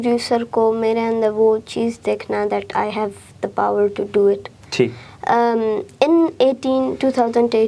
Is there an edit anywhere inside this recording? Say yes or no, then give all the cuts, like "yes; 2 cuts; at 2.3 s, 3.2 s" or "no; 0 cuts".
no; 0 cuts